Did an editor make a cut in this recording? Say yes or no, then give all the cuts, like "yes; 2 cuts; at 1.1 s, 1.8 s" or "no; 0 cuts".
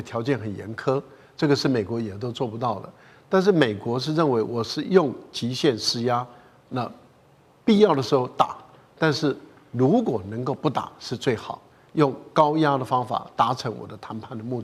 no; 0 cuts